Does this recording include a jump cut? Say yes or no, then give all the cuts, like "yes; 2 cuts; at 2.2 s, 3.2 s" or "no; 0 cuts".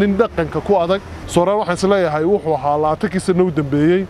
yes; 1 cut; at 1.1 s